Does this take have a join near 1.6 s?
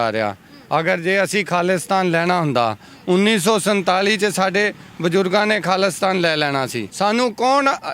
no; 1 cut; at 6.8 s

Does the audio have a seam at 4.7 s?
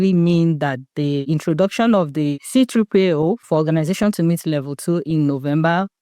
no; 3 cuts; at 1.2 s, 2.4 s, 3.4 s

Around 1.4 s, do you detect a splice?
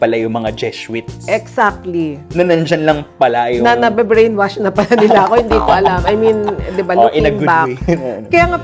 no; 0 cuts

